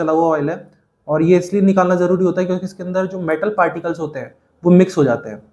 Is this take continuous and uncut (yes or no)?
yes